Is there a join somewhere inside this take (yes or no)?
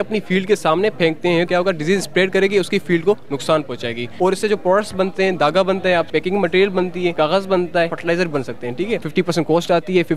yes